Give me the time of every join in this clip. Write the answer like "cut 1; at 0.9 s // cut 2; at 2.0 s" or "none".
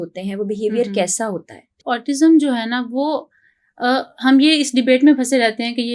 cut 1; at 1.8 s

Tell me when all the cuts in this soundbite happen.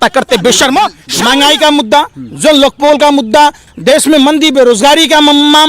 cut 1; at 1.0 s // cut 2; at 3.7 s

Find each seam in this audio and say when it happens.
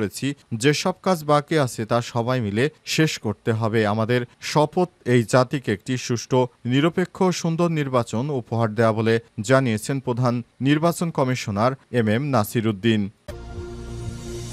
cut 1; at 13.2 s

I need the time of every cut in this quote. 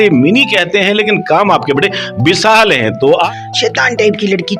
cut 1; at 3.3 s

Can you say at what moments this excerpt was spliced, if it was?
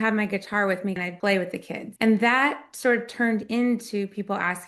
cut 1; at 1.0 s // cut 2; at 1.8 s

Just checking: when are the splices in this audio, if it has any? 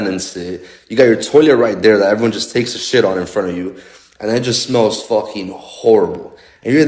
none

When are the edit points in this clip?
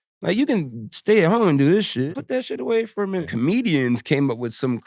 cut 1; at 2.1 s // cut 2; at 3.3 s

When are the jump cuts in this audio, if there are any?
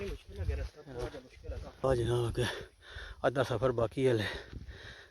cut 1; at 1.8 s

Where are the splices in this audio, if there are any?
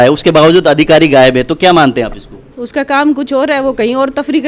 cut 1; at 2.5 s

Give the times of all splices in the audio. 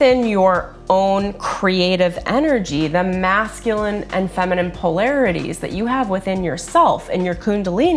none

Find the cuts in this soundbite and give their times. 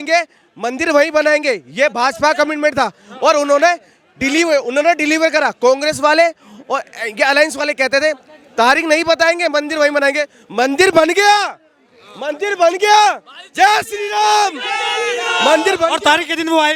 none

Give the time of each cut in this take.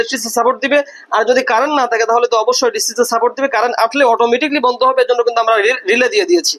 none

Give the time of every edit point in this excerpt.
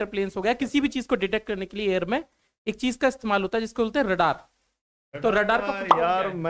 none

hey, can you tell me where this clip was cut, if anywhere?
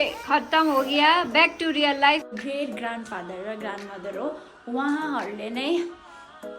cut 1; at 2.3 s

